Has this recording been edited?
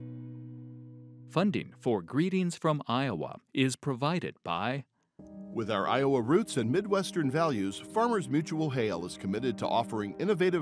yes; 1 cut; at 1.2 s

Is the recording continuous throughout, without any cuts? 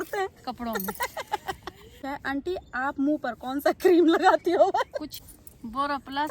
no; 2 cuts; at 1.9 s, 5.1 s

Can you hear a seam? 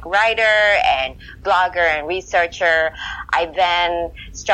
no; 0 cuts

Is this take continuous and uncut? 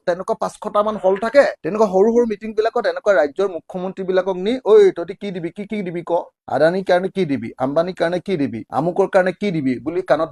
yes; 0 cuts

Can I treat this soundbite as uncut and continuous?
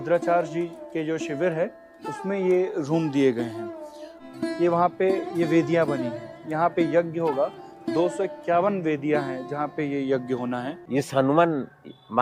no; 2 cuts; at 4.1 s, 10.7 s

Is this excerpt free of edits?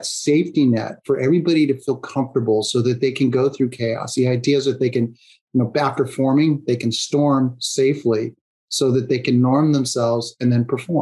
yes; 0 cuts

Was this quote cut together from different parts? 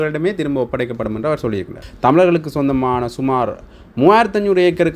yes; 1 cut; at 1.8 s

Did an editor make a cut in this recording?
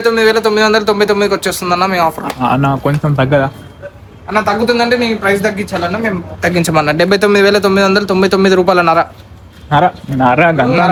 no; 0 cuts

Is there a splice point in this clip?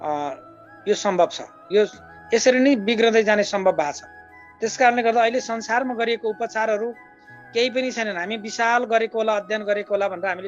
no; 0 cuts

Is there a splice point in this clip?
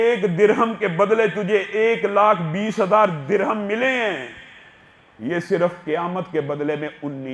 no; 0 cuts

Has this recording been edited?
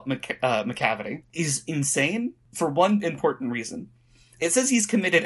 yes; 2 cuts; at 1.2 s, 2.4 s

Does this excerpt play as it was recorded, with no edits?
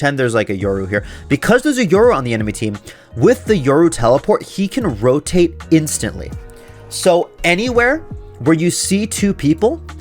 yes; 0 cuts

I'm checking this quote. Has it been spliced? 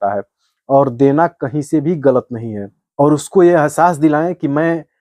yes; 1 cut; at 2.8 s

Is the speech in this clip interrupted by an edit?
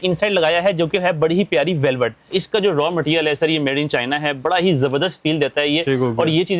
yes; 1 cut; at 2.3 s

